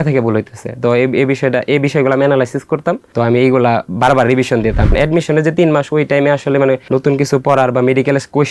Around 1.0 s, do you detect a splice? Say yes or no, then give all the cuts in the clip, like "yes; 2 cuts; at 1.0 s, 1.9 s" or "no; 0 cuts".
no; 3 cuts; at 3.0 s, 4.9 s, 6.8 s